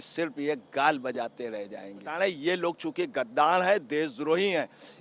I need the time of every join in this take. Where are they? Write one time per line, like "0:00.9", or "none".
0:02.1